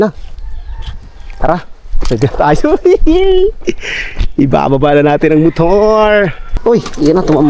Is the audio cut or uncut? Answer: cut